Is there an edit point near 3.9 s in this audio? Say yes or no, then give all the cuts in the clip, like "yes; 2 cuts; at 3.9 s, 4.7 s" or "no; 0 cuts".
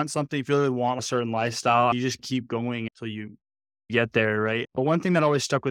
yes; 2 cuts; at 1.0 s, 3.9 s